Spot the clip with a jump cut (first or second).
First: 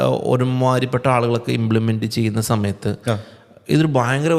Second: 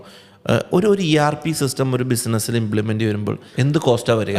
second